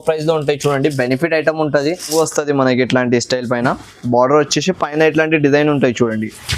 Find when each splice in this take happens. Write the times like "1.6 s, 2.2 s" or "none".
2.1 s